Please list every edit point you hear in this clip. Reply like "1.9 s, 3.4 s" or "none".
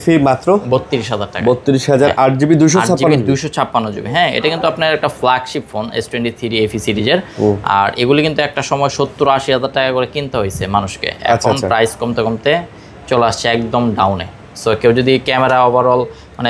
none